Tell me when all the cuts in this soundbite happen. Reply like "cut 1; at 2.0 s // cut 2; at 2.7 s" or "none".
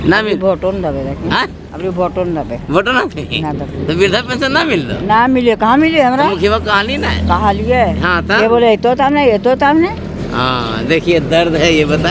none